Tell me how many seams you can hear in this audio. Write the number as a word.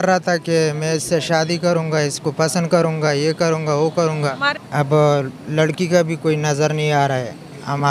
one